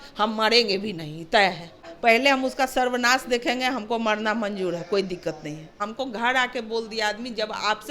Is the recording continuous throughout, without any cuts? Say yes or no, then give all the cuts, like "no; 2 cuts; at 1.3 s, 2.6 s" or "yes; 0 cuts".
no; 2 cuts; at 1.9 s, 5.9 s